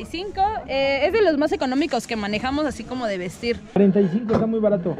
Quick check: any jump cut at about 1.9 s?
no; 1 cut; at 3.8 s

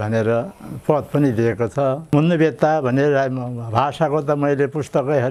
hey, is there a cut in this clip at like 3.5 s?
no; 1 cut; at 2.0 s

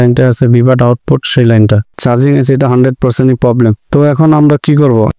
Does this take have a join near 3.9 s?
no; 1 cut; at 1.9 s

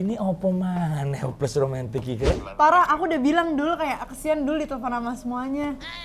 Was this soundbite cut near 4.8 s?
no; 1 cut; at 2.5 s

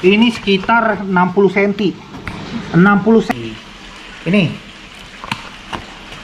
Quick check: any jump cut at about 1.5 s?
no; 1 cut; at 3.3 s

